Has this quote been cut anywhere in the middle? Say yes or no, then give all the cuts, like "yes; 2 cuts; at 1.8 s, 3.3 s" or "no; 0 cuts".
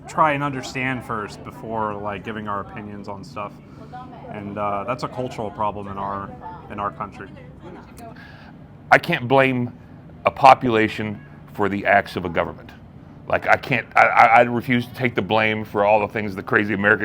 yes; 1 cut; at 8.1 s